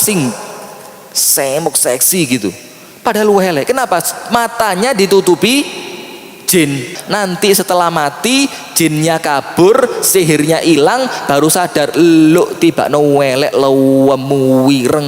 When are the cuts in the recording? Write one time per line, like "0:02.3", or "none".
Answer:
0:07.0

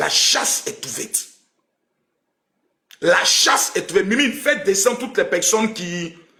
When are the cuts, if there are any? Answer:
none

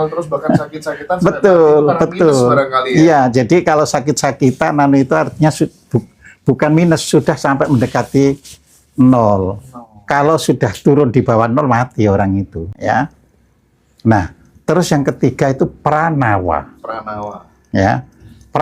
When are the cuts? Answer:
0:12.7

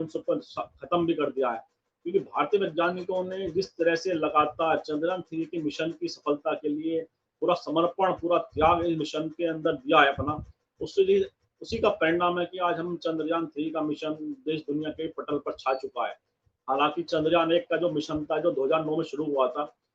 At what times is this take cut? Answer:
none

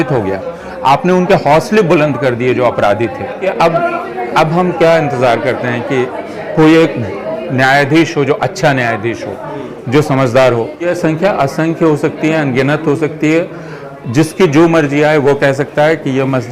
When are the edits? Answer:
0:03.5
0:10.9

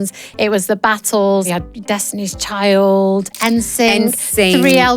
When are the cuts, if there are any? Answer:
0:01.5
0:03.3

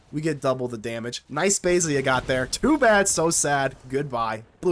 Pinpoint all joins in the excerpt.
none

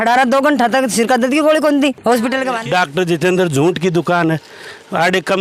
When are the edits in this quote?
0:02.6

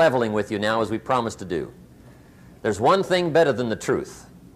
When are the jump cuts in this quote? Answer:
none

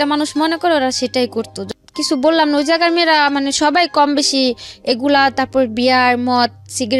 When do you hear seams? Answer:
0:01.6

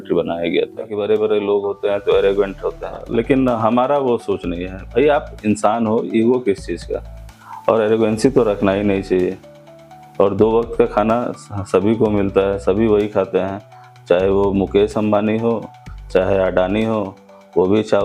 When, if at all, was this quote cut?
0:00.9
0:03.0

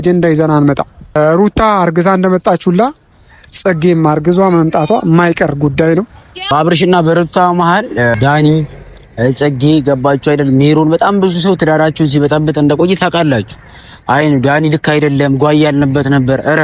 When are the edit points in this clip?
0:01.2
0:06.3
0:08.2

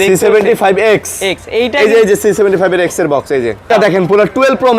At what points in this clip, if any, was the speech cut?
0:03.7

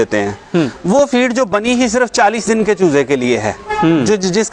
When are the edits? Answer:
none

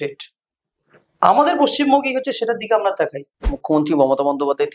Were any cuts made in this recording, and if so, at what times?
0:03.5

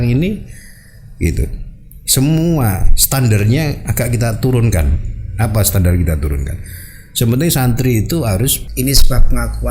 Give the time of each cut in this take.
0:08.6

